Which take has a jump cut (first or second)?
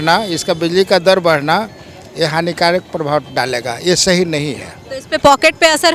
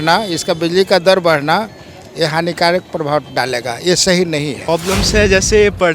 second